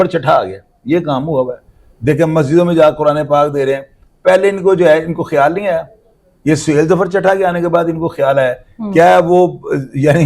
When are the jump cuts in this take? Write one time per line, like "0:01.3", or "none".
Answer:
none